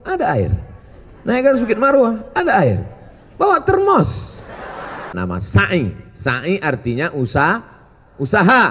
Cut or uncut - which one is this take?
cut